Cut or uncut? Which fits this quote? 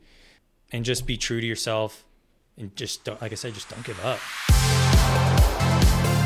cut